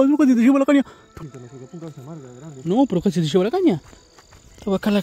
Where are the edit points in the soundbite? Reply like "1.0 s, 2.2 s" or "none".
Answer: 1.0 s